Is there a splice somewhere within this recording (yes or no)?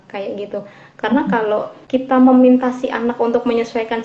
yes